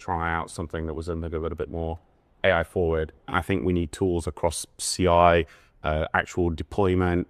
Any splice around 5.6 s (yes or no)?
no